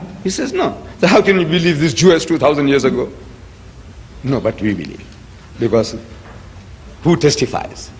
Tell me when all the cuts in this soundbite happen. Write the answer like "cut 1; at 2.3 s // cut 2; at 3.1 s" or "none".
none

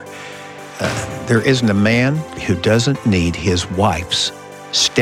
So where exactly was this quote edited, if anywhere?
cut 1; at 2.3 s

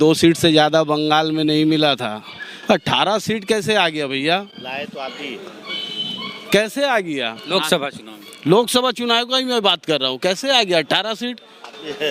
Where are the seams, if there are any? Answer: none

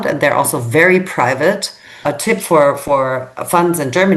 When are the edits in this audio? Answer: cut 1; at 2.1 s

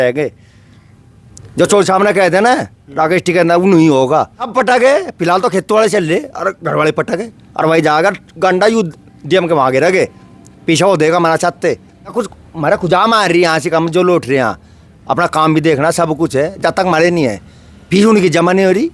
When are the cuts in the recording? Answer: cut 1; at 4.4 s // cut 2; at 12.1 s

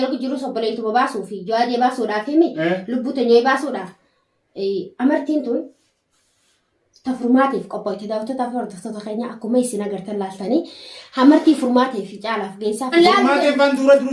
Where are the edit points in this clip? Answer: cut 1; at 12.9 s

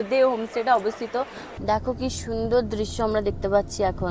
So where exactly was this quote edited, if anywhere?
cut 1; at 1.4 s

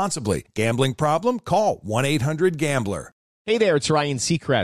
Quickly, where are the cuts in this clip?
cut 1; at 3.3 s

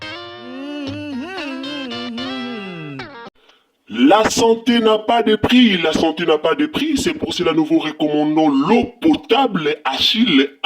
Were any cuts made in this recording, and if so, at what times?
cut 1; at 3.1 s

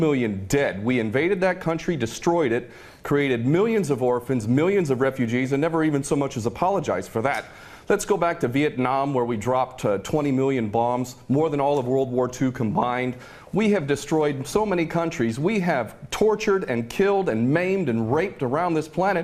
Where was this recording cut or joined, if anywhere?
cut 1; at 10.8 s

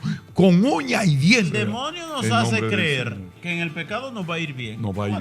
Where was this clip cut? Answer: cut 1; at 1.5 s // cut 2; at 3.4 s

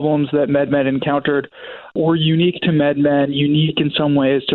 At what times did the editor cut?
none

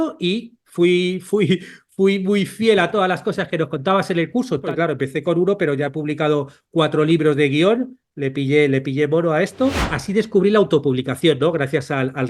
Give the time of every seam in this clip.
cut 1; at 4.7 s // cut 2; at 9.9 s

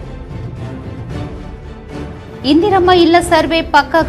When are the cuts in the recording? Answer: cut 1; at 2.4 s

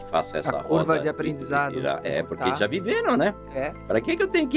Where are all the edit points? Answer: none

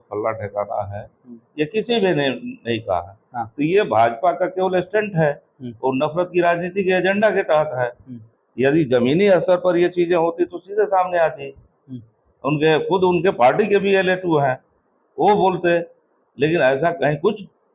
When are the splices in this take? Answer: none

